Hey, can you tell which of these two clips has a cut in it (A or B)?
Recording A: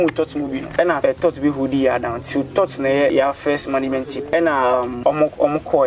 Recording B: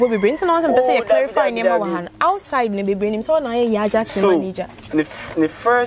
A